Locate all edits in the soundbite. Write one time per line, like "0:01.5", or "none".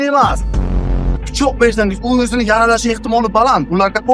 0:00.9